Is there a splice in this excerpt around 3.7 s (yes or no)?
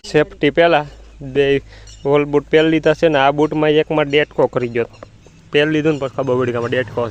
no